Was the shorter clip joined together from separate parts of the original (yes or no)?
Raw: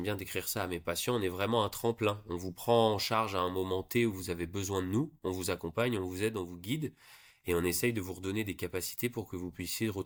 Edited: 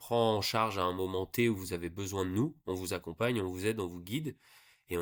no